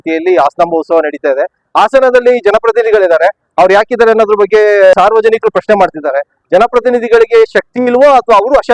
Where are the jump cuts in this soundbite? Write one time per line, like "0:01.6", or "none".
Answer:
0:01.6
0:04.9
0:06.3